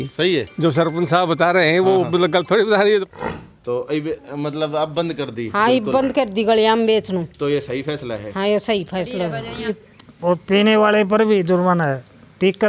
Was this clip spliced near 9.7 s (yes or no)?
yes